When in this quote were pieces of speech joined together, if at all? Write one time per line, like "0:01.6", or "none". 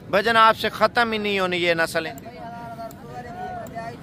0:02.1